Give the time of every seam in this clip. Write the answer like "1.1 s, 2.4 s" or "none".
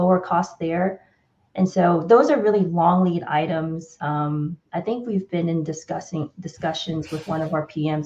3.9 s